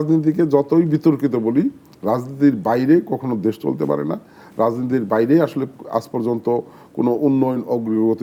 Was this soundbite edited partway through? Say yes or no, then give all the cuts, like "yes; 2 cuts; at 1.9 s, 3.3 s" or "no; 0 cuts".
no; 0 cuts